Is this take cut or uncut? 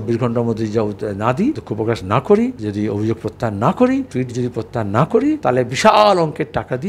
cut